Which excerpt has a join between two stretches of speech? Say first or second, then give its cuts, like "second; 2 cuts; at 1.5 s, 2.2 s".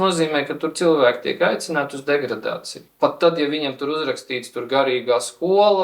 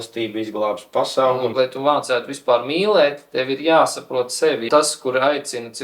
second; 2 cuts; at 1.5 s, 4.6 s